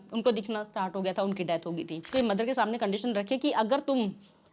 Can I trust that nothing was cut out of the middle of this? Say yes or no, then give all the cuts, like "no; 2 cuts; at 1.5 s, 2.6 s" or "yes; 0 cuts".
no; 1 cut; at 2.1 s